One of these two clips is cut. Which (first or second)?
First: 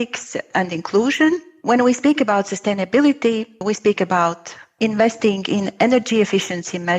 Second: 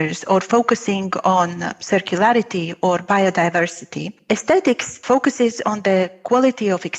first